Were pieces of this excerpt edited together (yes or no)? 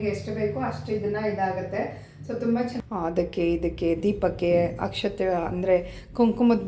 yes